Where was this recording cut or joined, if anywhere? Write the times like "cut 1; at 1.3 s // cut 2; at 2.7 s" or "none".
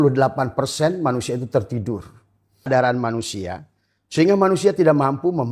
cut 1; at 2.7 s

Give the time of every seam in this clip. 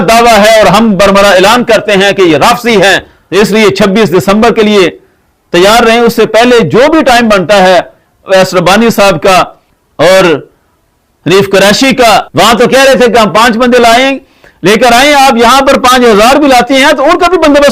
cut 1; at 3.1 s // cut 2; at 12.0 s

